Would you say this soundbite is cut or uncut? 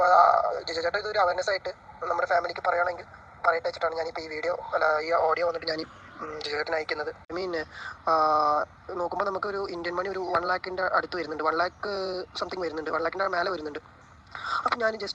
cut